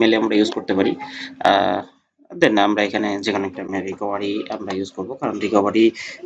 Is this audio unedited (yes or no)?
yes